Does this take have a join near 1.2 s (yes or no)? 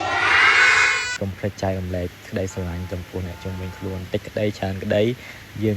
yes